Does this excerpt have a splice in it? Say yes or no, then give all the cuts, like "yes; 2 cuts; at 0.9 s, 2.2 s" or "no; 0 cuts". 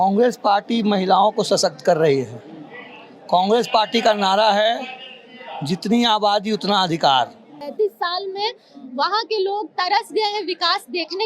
yes; 1 cut; at 7.6 s